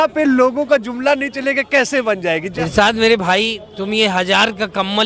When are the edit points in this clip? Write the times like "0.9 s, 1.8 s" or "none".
2.5 s